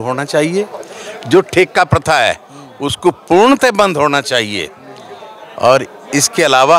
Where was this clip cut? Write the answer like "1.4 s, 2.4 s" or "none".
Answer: none